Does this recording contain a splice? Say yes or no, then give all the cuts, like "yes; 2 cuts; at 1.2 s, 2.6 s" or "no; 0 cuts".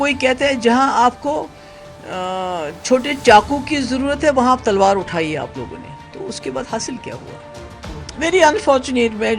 no; 0 cuts